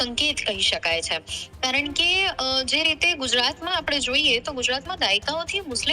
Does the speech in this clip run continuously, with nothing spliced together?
yes; 0 cuts

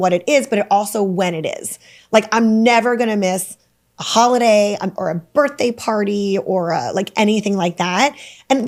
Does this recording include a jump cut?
no; 0 cuts

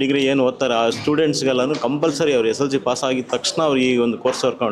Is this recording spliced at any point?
no; 0 cuts

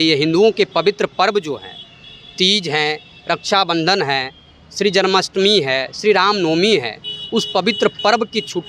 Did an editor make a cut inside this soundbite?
no; 0 cuts

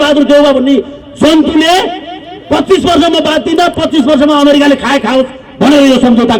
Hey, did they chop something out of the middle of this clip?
no; 0 cuts

